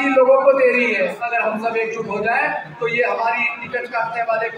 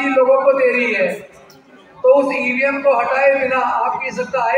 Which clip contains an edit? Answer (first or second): first